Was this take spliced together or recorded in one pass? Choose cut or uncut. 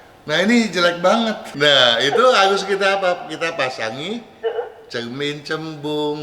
cut